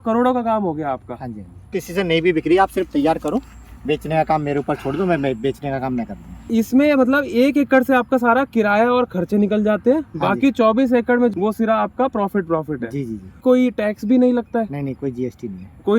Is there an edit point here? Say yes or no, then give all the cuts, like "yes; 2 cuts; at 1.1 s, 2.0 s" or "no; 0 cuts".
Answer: yes; 4 cuts; at 1.7 s, 6.4 s, 11.3 s, 13.4 s